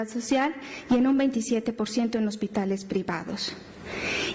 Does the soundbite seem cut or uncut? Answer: cut